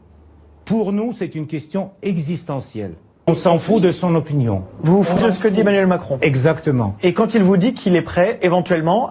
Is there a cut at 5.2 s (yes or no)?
yes